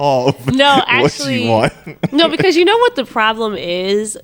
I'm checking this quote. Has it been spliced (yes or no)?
no